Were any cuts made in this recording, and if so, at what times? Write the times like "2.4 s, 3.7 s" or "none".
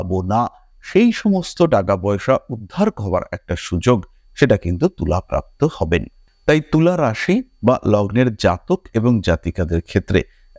none